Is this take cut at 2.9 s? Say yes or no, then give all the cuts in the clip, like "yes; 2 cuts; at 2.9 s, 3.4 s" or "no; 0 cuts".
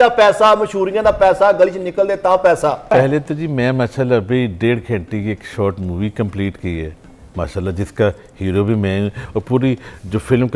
yes; 1 cut; at 2.9 s